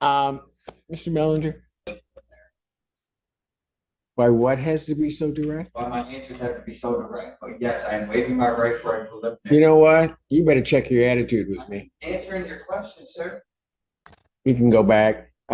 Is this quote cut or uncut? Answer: cut